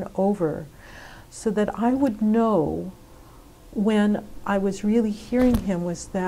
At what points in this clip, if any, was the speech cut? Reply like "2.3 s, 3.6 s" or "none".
none